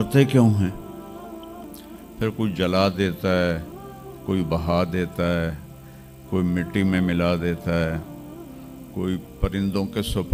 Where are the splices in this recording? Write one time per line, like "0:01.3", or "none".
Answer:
none